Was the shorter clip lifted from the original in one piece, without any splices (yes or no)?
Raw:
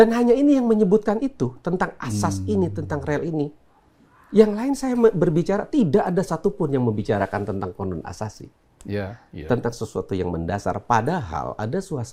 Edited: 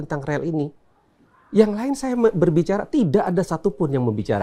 yes